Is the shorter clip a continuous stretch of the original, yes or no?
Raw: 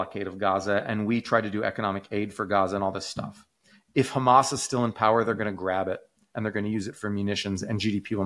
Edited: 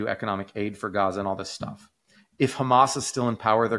yes